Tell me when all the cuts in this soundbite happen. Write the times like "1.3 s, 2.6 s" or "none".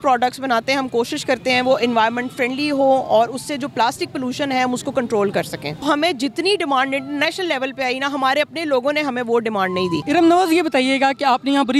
5.8 s, 10.0 s